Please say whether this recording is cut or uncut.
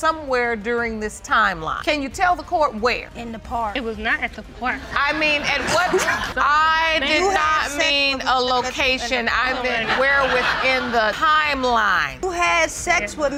uncut